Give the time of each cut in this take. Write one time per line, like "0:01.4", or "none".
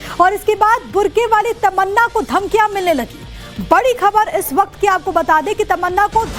none